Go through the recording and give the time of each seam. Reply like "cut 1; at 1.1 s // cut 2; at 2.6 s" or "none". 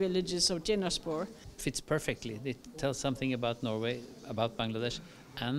cut 1; at 1.4 s

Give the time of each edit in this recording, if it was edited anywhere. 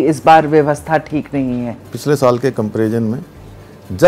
cut 1; at 1.8 s

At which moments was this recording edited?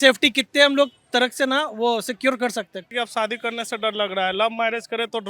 cut 1; at 2.9 s

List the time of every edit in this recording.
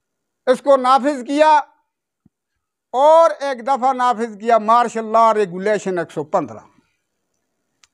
none

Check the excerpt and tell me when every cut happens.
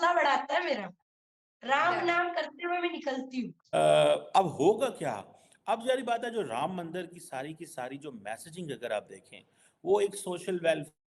cut 1; at 3.8 s

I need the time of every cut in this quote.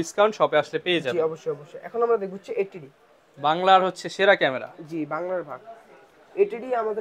none

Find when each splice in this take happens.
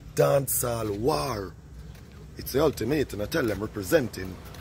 none

